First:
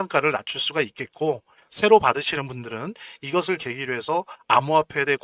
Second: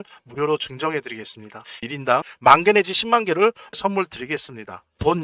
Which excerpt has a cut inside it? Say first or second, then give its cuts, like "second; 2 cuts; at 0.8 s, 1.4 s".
second; 1 cut; at 1.8 s